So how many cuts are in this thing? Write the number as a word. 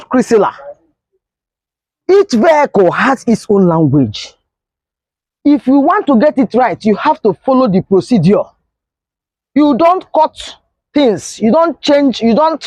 zero